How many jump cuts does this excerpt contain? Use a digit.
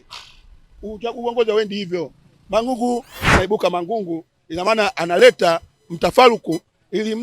1